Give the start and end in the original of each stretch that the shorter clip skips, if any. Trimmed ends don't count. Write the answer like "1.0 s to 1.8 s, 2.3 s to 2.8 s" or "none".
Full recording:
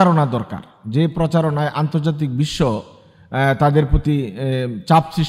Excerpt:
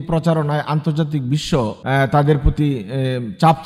2.9 s to 3.3 s